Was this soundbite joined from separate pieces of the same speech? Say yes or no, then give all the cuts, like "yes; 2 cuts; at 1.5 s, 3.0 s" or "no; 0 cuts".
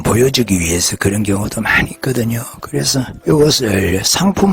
yes; 1 cut; at 3.1 s